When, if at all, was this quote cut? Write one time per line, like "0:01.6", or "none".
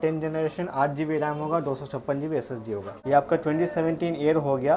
0:02.9